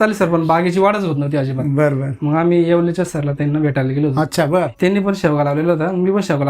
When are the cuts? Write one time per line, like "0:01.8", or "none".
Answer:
0:04.7